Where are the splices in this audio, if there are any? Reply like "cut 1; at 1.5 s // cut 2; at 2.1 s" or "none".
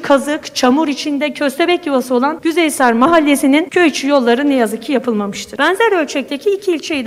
cut 1; at 2.4 s // cut 2; at 3.7 s // cut 3; at 5.4 s

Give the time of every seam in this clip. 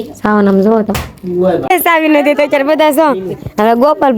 cut 1; at 1.7 s

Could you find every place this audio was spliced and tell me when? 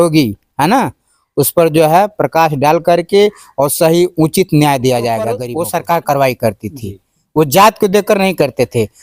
cut 1; at 5.4 s

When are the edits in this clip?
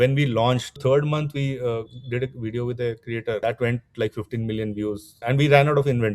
cut 1; at 0.8 s // cut 2; at 3.4 s // cut 3; at 5.2 s

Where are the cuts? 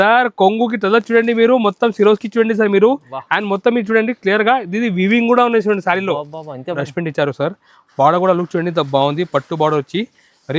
cut 1; at 6.8 s

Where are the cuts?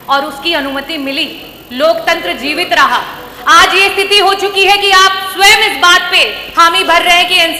none

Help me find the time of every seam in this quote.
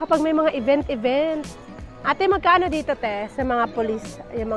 none

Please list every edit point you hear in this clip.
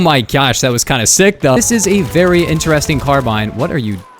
cut 1; at 1.6 s

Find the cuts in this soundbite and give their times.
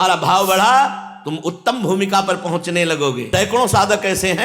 cut 1; at 3.2 s

